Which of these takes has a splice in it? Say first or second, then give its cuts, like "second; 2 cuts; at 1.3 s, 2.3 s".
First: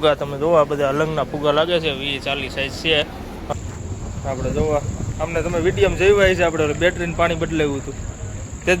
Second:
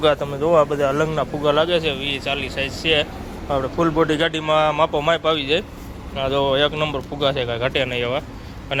first; 1 cut; at 3.4 s